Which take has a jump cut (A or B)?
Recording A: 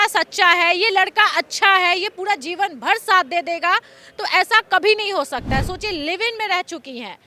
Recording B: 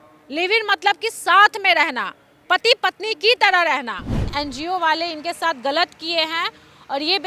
B